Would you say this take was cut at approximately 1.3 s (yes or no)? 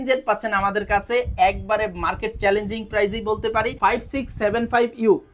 no